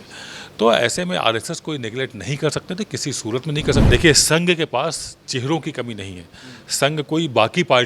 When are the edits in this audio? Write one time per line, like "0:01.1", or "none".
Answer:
0:03.8